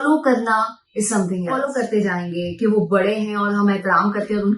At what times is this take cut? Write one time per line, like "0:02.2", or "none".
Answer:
0:01.6